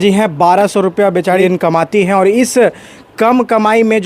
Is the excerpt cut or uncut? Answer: cut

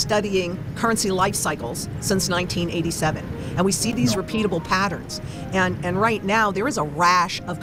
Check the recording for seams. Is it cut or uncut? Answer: uncut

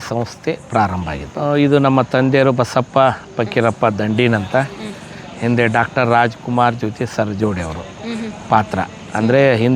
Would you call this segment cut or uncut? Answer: cut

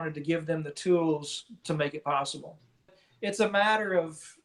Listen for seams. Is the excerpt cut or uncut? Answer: cut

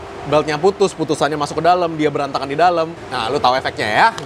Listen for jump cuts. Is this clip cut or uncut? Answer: cut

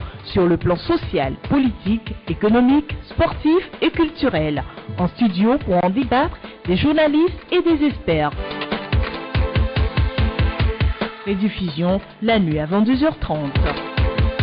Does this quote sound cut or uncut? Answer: uncut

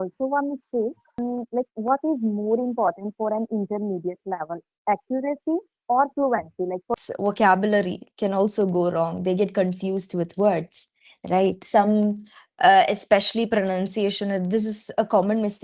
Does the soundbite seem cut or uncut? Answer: cut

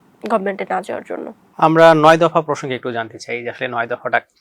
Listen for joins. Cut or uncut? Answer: cut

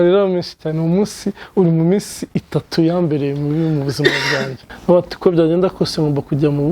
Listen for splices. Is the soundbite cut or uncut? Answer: cut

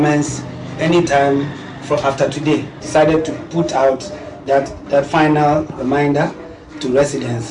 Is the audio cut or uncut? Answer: cut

